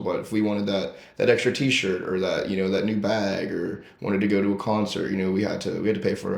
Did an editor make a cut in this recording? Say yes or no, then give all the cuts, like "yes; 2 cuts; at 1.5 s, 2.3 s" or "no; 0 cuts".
no; 0 cuts